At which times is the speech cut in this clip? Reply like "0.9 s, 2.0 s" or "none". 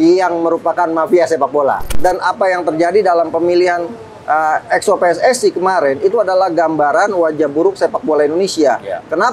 2.0 s